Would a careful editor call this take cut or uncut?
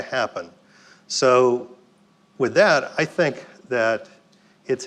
uncut